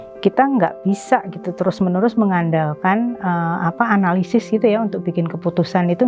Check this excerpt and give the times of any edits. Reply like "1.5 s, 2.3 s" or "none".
none